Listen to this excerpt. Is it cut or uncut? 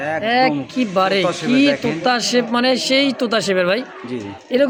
uncut